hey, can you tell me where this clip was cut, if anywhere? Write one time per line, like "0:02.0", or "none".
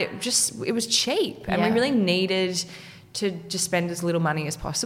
none